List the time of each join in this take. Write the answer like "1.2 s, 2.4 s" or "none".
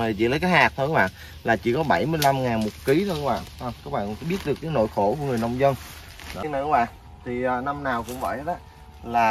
6.4 s